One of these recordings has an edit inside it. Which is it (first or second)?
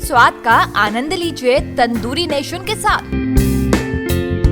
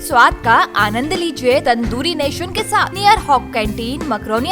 second